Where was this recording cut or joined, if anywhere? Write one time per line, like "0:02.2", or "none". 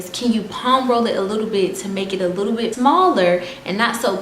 0:02.7